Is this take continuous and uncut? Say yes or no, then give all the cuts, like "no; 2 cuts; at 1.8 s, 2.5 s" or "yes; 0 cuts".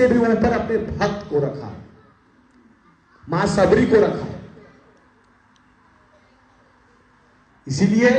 yes; 0 cuts